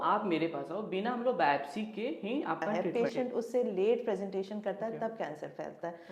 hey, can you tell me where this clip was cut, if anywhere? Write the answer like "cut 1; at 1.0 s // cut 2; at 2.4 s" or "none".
cut 1; at 2.8 s